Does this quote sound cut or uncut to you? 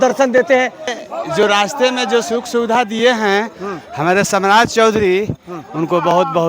cut